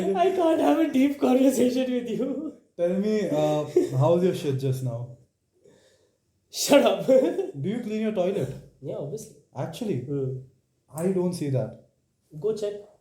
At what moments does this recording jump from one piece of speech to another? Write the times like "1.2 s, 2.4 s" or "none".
none